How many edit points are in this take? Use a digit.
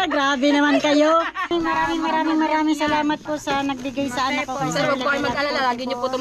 1